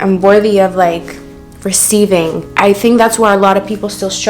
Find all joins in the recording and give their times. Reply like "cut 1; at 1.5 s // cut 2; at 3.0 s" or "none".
cut 1; at 2.5 s